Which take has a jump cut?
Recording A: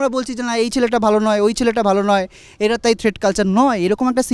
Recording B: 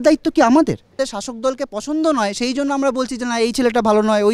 B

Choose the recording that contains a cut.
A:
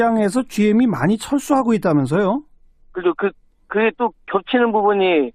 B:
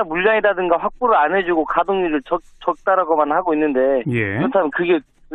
B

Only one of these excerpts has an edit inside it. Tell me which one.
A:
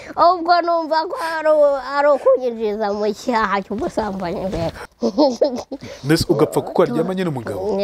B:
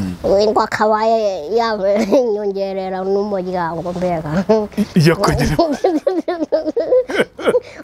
A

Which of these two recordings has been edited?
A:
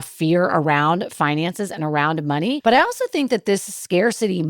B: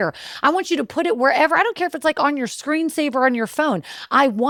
A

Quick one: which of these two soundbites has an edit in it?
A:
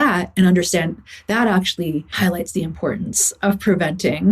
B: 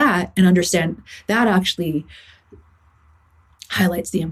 A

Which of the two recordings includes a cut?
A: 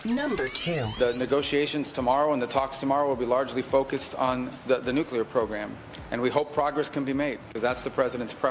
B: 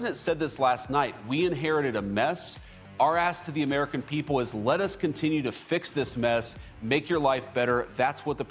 A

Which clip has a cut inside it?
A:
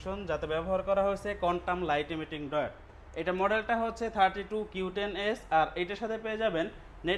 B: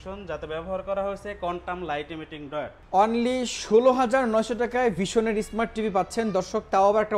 B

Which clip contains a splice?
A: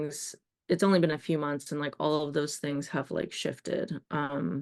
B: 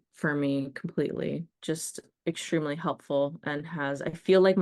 B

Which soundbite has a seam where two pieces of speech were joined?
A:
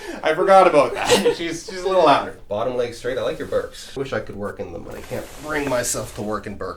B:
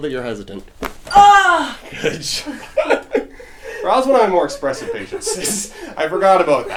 A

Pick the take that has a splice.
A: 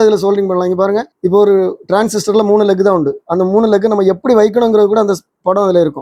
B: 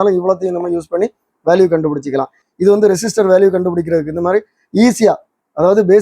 B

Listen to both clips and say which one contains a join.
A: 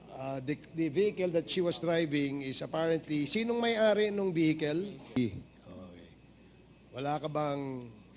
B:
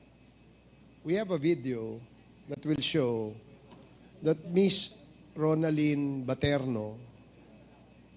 A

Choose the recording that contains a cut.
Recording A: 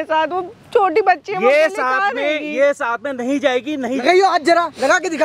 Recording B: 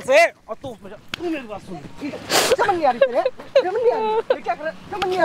A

